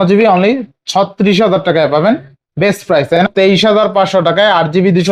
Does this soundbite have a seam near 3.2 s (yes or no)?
yes